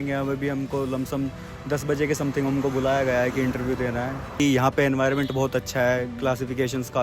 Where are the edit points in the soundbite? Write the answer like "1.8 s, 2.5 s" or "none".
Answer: 4.4 s